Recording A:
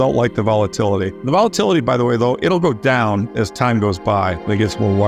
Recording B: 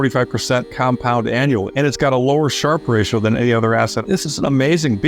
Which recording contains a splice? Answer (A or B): B